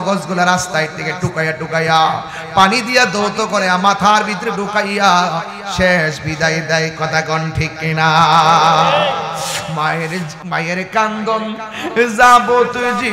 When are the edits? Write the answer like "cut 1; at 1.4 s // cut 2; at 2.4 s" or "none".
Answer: none